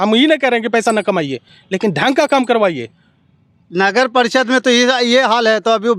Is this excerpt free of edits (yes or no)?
yes